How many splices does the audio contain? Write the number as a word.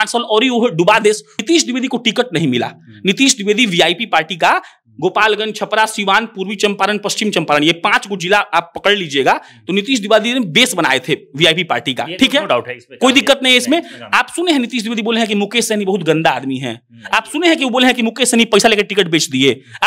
one